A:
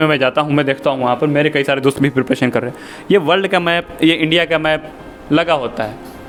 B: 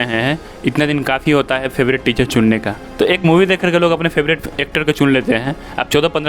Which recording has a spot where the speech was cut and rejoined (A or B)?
B